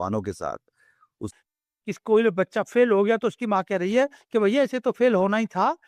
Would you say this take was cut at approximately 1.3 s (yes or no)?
yes